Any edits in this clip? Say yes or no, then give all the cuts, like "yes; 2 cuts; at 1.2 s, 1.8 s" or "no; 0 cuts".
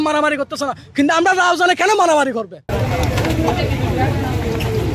no; 0 cuts